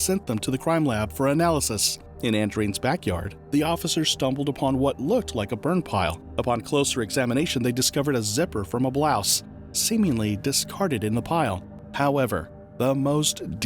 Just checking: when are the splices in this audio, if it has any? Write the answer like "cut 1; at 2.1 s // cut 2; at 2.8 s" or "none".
cut 1; at 11.7 s